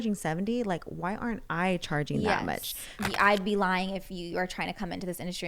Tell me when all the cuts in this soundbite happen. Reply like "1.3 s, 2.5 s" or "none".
3.0 s